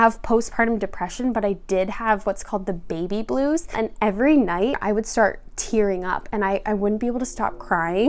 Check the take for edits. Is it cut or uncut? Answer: cut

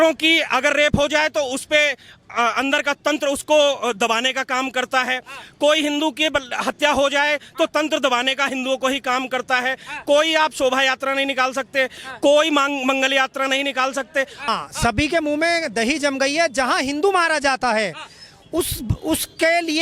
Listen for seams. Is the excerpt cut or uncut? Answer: cut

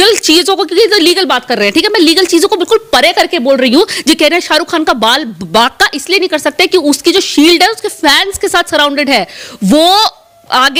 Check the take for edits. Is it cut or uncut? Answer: uncut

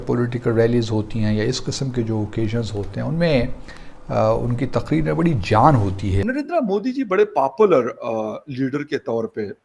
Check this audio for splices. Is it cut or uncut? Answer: cut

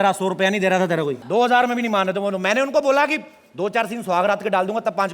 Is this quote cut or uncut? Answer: cut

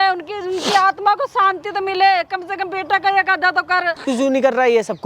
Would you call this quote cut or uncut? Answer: cut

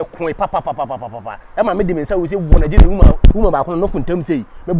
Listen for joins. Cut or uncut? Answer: uncut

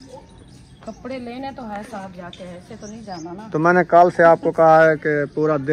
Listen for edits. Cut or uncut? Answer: uncut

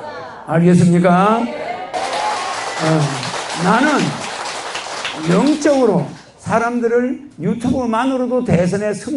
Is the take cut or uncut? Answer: cut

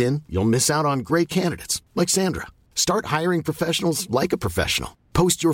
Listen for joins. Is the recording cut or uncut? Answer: uncut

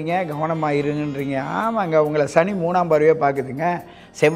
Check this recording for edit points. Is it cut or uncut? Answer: uncut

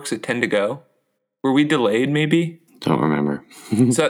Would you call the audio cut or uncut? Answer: cut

